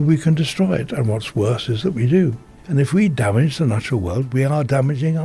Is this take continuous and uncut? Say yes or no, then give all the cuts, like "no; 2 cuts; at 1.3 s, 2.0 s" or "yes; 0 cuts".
no; 1 cut; at 2.5 s